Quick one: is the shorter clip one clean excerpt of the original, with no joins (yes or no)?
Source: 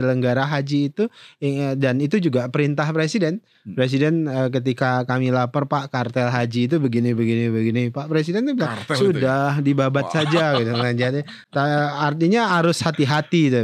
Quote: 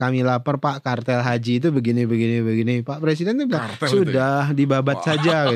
yes